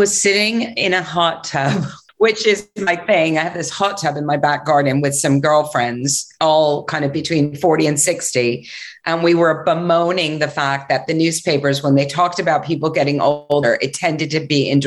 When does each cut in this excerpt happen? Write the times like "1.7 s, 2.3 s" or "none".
2.0 s